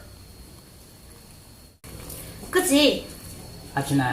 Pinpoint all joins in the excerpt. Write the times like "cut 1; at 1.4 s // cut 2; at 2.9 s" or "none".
cut 1; at 1.8 s